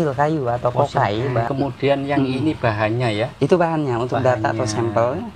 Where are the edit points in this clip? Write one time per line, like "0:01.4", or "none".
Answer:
0:01.5